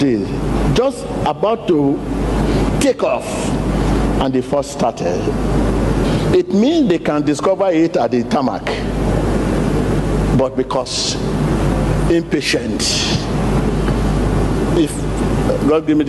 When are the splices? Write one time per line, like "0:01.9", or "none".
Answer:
none